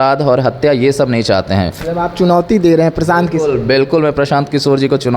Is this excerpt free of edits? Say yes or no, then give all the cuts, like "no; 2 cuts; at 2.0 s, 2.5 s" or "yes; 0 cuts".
no; 1 cut; at 1.8 s